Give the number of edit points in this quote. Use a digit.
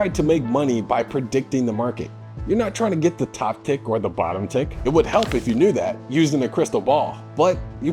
0